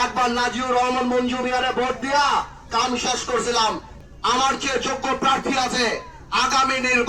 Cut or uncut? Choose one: cut